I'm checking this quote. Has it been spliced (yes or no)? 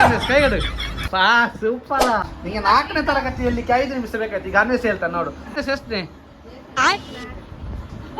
yes